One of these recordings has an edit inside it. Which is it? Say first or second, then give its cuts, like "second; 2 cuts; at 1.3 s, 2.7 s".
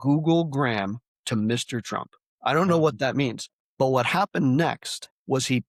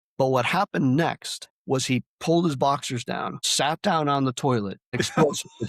second; 1 cut; at 4.8 s